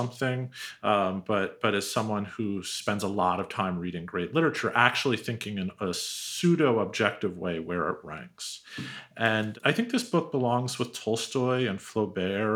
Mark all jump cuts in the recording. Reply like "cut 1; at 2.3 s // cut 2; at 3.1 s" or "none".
none